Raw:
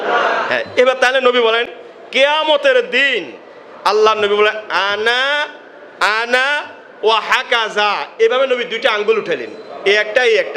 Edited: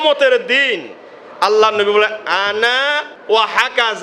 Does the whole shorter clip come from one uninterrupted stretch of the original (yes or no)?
no